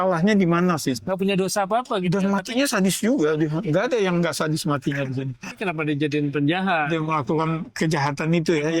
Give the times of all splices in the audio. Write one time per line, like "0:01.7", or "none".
0:01.0
0:05.5